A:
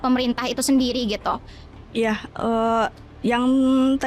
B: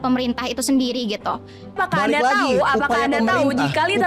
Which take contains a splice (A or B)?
B